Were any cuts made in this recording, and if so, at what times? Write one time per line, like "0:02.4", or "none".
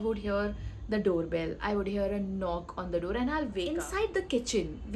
0:03.7